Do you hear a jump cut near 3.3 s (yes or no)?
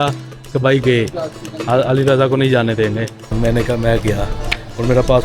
yes